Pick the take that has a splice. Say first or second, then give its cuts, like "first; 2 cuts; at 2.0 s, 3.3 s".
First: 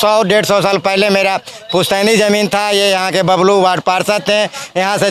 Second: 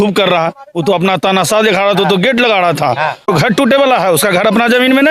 second; 1 cut; at 3.3 s